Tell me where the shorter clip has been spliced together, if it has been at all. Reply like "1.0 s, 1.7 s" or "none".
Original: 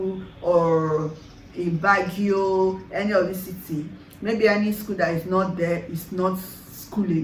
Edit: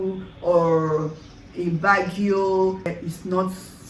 2.9 s